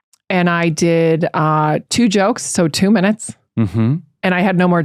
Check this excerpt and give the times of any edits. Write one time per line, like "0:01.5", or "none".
none